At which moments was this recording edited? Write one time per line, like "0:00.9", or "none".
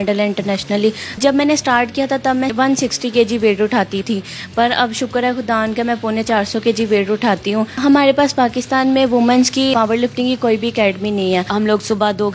0:01.2
0:02.5
0:04.0
0:07.7
0:09.7
0:11.5